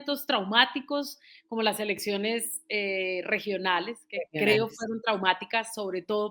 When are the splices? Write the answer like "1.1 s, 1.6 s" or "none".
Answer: none